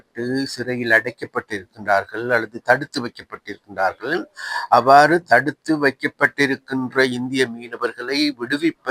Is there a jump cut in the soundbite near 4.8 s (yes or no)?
no